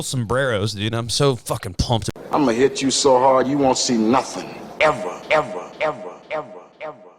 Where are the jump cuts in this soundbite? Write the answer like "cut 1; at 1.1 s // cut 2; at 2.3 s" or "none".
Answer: cut 1; at 2.1 s